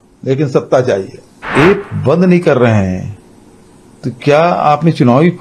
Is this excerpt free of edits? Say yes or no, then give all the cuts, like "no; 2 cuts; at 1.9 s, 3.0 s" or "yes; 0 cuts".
no; 1 cut; at 1.4 s